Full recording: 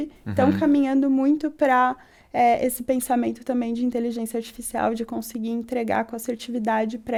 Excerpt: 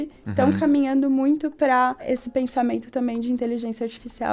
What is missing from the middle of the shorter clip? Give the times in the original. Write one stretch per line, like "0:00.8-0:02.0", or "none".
0:02.1-0:02.6